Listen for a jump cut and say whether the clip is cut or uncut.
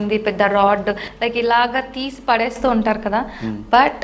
uncut